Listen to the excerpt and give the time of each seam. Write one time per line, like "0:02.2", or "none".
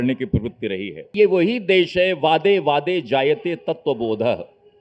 0:01.1